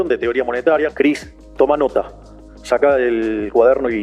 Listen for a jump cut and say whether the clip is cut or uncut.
cut